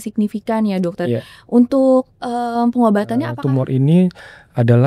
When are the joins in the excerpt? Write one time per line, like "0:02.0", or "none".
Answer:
0:03.4